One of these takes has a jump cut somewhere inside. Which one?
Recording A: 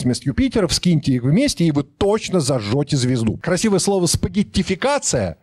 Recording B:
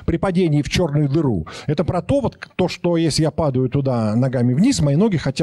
A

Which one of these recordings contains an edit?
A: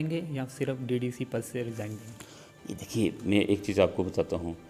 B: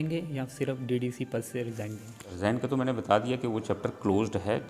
B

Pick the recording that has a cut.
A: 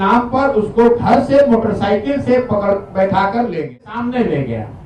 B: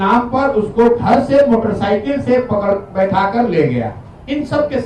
A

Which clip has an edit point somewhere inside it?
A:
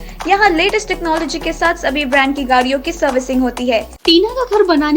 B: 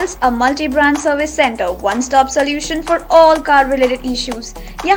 A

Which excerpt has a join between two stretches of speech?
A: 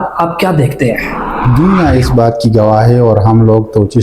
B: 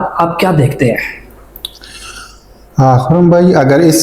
A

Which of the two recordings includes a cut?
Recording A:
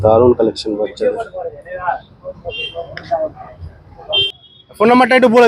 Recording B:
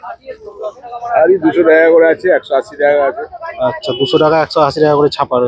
A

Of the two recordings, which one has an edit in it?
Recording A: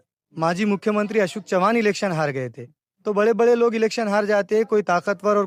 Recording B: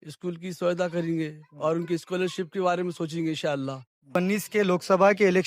B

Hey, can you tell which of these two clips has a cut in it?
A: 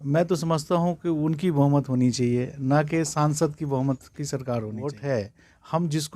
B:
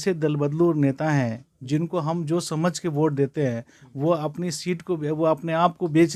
A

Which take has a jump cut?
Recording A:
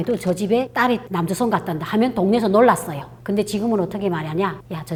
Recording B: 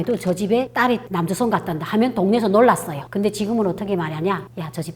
B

